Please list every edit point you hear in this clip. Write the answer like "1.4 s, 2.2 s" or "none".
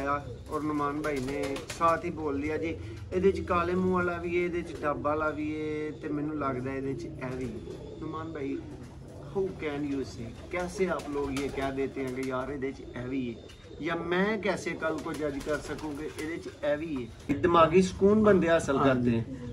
17.3 s

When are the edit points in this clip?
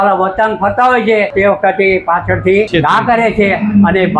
1.3 s, 2.7 s

